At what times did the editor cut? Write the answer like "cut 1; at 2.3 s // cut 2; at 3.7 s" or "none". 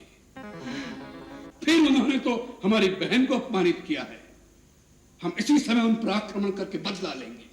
cut 1; at 1.5 s